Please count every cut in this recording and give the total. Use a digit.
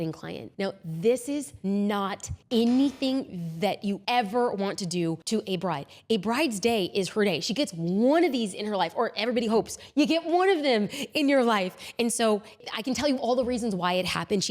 4